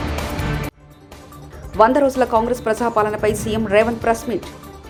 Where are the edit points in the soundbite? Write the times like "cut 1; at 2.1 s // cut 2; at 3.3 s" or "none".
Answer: none